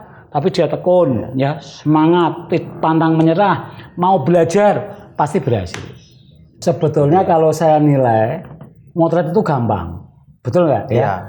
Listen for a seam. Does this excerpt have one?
yes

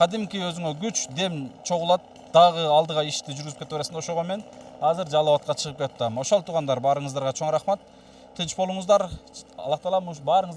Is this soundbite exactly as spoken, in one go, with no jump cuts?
yes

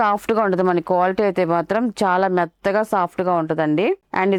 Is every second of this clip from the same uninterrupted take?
yes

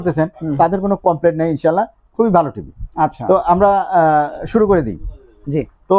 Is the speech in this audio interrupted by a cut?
no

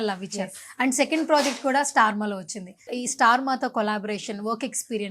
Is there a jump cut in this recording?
yes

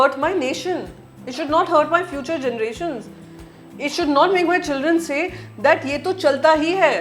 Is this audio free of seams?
yes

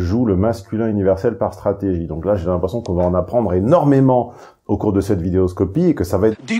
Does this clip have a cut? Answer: no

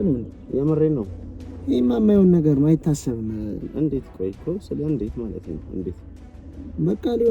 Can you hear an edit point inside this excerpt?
no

